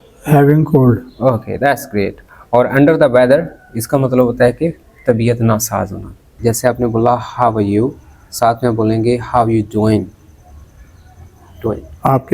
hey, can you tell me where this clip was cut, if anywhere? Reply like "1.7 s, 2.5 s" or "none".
6.3 s